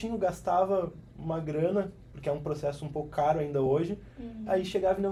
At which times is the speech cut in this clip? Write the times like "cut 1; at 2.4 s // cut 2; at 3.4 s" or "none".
none